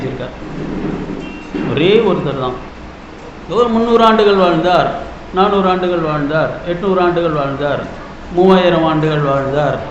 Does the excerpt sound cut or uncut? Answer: cut